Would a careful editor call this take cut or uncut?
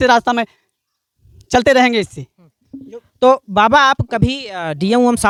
uncut